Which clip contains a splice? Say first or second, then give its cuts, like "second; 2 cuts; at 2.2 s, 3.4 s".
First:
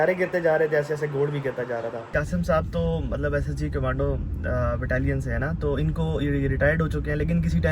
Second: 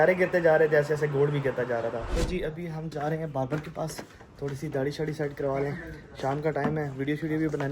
first; 1 cut; at 2.1 s